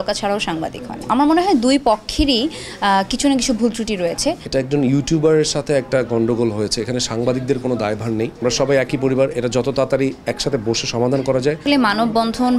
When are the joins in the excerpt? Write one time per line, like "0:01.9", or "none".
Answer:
0:01.1
0:04.4
0:08.4
0:11.6